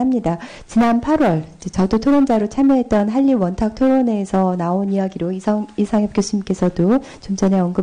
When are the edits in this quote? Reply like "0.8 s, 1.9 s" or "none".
5.3 s